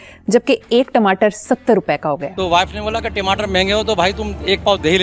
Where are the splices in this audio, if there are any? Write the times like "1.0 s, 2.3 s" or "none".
2.3 s

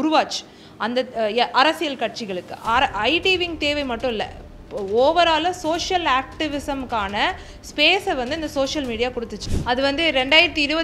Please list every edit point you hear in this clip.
9.4 s

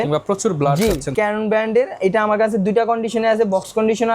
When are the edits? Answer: 1.1 s

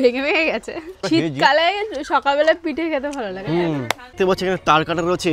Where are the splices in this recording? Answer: 1.0 s, 4.1 s

